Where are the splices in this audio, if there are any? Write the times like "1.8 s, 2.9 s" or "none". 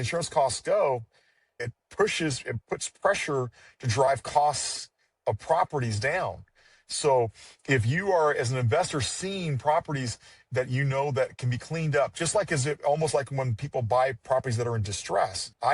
1.6 s